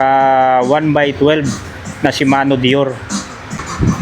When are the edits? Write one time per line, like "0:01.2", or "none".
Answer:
0:03.1